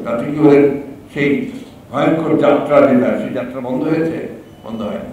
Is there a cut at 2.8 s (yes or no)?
no